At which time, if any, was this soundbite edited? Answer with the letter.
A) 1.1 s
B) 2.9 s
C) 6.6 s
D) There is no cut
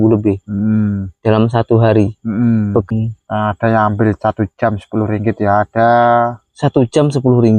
B